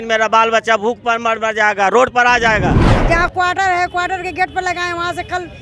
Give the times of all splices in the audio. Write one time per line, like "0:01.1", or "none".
0:02.9